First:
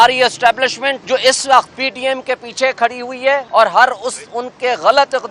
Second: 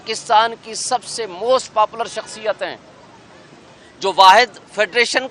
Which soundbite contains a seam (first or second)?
first